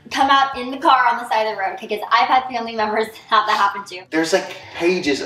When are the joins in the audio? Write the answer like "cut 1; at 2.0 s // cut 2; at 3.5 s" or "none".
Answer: cut 1; at 3.9 s